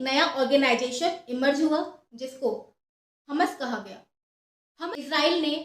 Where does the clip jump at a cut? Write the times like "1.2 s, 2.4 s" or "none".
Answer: 4.7 s